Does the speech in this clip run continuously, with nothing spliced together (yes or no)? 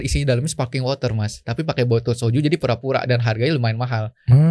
yes